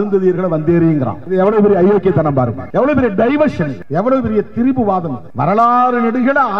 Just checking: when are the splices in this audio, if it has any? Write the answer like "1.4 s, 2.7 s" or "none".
1.2 s, 2.6 s, 3.8 s, 5.2 s